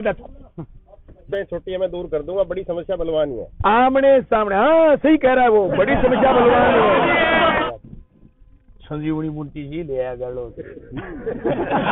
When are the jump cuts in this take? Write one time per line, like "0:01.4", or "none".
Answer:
0:01.2
0:07.6

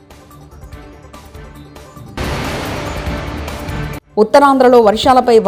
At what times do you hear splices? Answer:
none

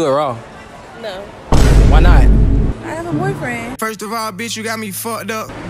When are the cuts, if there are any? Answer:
0:01.4
0:02.7

